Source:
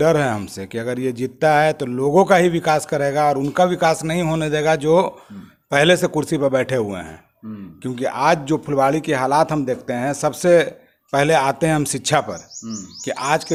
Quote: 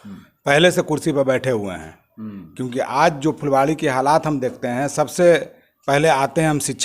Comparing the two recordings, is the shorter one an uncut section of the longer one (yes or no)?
yes